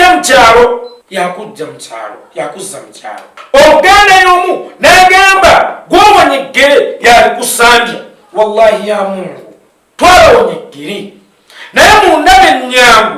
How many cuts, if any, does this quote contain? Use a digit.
2